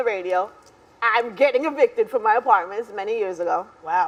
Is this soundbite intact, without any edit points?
yes; 0 cuts

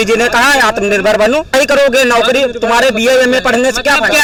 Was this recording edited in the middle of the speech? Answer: no; 0 cuts

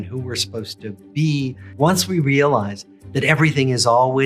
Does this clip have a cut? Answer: yes; 1 cut; at 1.6 s

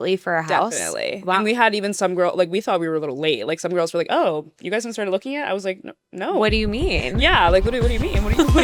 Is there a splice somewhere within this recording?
no; 0 cuts

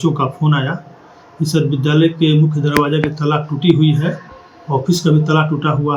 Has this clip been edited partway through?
no; 0 cuts

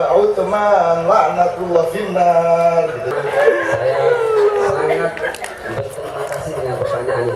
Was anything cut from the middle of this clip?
yes; 1 cut; at 3.1 s

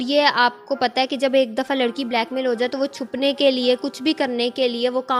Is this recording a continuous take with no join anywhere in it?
yes; 0 cuts

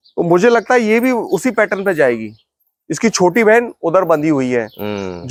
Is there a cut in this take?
no; 0 cuts

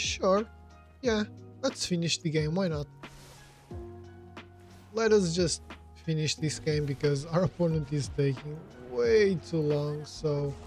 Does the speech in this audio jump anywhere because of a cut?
yes; 2 cuts; at 3.1 s, 4.9 s

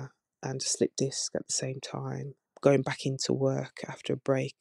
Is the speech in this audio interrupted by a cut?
no; 0 cuts

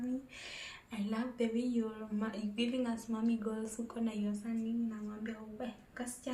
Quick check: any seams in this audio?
no; 0 cuts

